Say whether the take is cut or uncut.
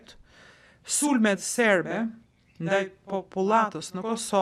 uncut